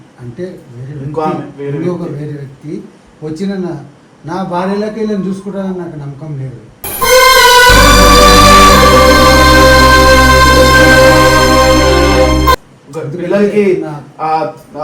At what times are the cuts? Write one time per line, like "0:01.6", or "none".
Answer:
none